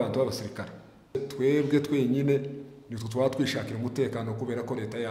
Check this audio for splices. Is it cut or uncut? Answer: cut